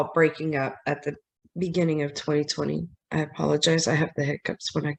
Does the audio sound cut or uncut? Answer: uncut